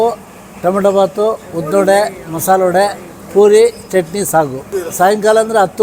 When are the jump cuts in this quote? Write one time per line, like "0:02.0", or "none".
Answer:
none